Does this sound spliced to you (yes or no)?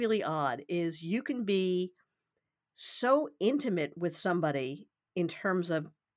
no